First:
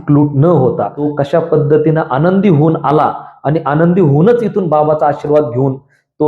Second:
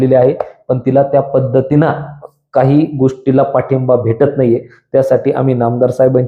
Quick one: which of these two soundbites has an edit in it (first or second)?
first